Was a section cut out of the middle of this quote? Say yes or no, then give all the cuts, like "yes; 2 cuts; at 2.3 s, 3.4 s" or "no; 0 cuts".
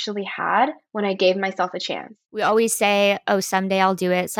yes; 1 cut; at 2.2 s